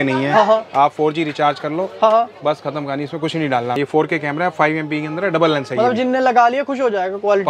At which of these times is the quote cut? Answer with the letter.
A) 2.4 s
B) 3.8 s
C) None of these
B